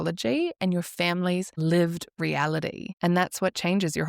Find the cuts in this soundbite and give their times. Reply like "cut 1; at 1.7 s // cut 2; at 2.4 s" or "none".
cut 1; at 1.5 s // cut 2; at 2.9 s